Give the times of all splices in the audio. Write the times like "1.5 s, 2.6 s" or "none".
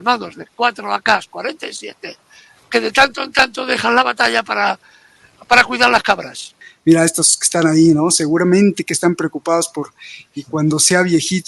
6.6 s

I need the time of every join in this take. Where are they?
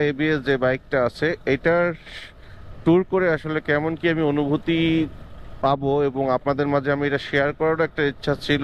none

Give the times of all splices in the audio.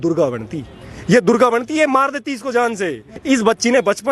3.1 s

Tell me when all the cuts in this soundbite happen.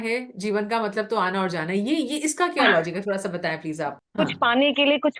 3.9 s

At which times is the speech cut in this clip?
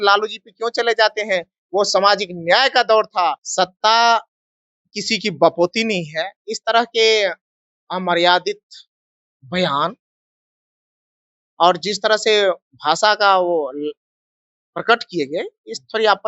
3.4 s

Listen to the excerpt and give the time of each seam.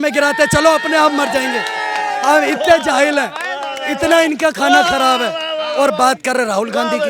none

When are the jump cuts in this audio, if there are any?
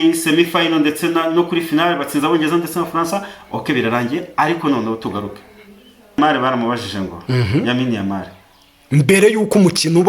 6.2 s

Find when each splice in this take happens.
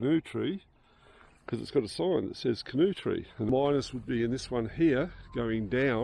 3.5 s

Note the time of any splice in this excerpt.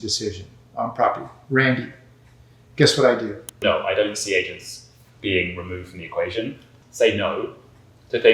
3.6 s, 6.6 s

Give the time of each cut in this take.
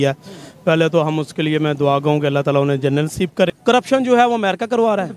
3.6 s

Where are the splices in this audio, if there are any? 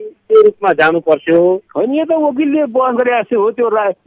1.7 s

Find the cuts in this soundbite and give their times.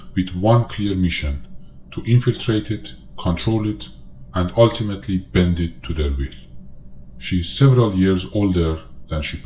none

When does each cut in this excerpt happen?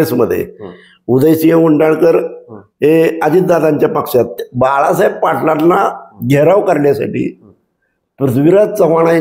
4.4 s

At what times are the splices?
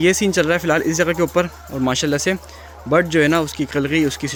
none

